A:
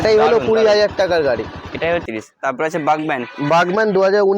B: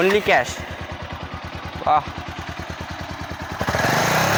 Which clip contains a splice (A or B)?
A